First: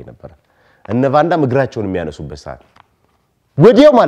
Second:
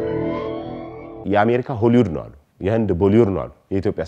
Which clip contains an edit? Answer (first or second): second